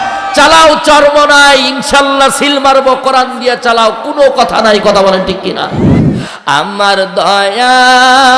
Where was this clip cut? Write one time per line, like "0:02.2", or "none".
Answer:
0:05.9